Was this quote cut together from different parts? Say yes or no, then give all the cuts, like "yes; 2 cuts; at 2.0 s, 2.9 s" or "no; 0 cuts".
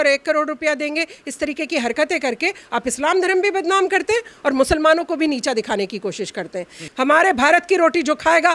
yes; 1 cut; at 6.8 s